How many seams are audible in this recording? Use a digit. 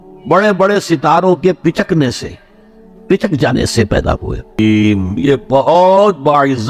1